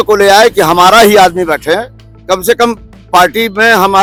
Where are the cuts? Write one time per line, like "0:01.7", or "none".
none